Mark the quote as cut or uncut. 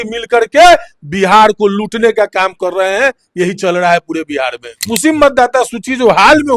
cut